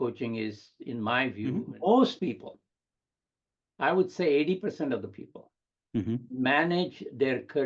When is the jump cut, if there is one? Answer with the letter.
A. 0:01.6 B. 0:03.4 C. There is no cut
A